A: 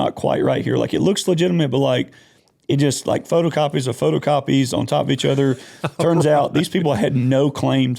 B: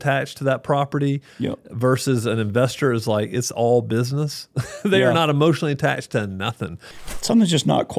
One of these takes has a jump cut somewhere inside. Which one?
B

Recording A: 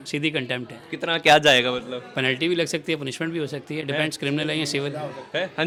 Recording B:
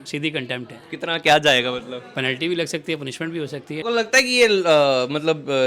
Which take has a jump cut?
B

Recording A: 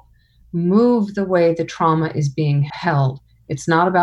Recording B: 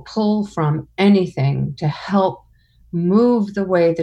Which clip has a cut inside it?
A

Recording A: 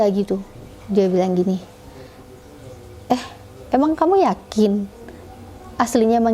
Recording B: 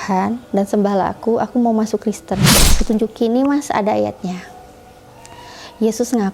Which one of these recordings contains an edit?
B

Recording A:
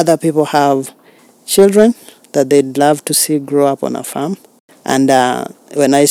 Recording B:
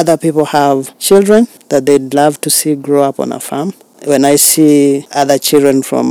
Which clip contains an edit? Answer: B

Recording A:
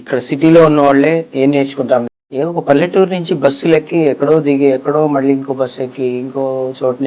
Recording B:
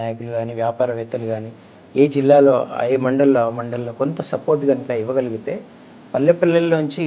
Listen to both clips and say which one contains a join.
A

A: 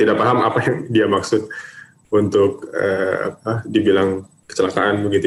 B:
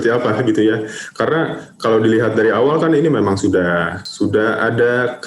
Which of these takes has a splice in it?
B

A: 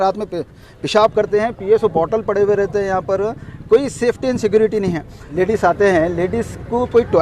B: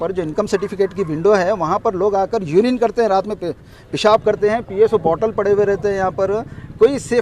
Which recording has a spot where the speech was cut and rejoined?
A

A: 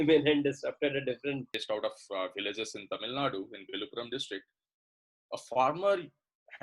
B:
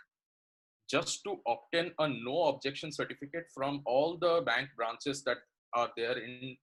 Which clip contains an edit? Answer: A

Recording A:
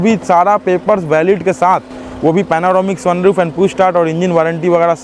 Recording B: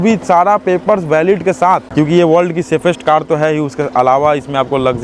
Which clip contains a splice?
B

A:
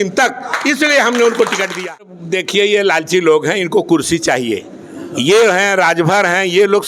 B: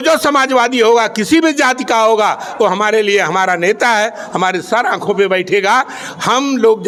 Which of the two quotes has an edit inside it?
A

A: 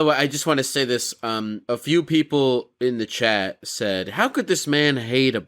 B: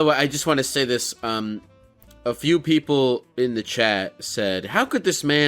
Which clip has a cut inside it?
A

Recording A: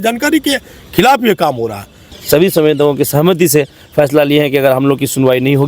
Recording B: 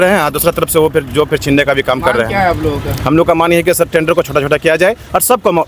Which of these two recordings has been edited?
A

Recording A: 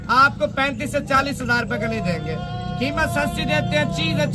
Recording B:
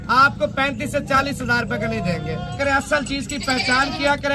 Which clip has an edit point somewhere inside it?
B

